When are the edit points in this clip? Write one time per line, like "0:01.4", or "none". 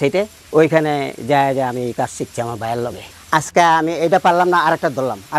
0:03.0